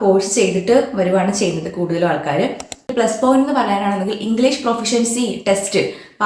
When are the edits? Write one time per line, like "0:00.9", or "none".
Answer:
0:02.9